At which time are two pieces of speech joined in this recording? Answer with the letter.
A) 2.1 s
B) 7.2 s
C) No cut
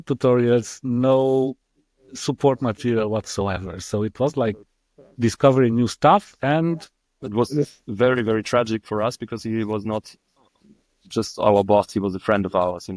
B